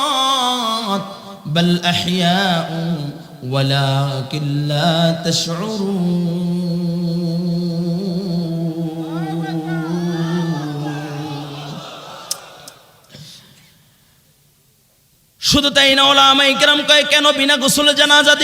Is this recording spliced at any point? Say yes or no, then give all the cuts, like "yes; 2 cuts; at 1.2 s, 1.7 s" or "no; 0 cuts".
no; 0 cuts